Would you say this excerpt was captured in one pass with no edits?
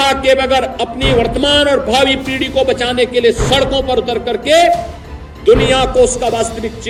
yes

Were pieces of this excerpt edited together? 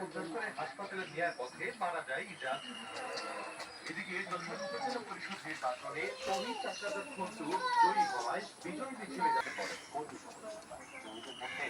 yes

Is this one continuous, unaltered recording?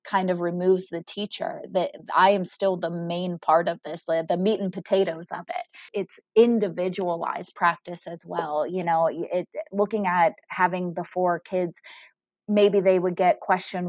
no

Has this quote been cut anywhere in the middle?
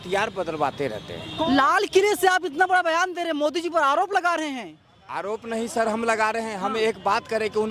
yes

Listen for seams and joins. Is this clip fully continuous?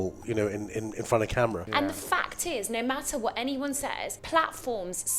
no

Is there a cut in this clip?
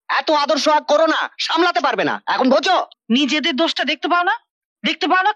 yes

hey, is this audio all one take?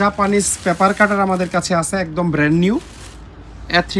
yes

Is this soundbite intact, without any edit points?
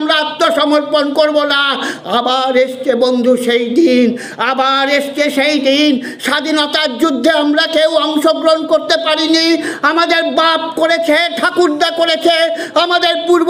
yes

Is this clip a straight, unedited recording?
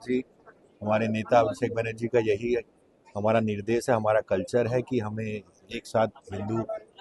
yes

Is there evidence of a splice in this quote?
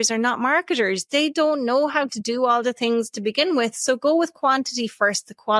no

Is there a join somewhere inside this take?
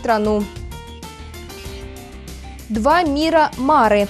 no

